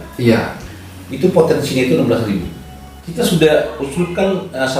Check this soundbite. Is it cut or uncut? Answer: cut